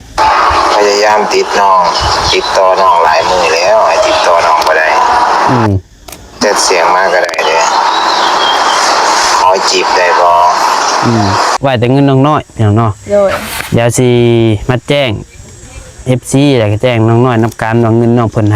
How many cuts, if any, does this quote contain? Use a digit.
1